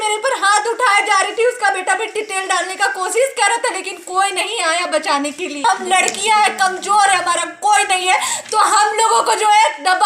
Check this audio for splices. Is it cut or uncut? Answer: cut